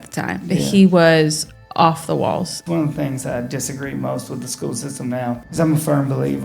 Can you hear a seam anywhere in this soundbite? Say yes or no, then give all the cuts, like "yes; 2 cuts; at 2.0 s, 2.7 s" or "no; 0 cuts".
yes; 2 cuts; at 2.6 s, 5.5 s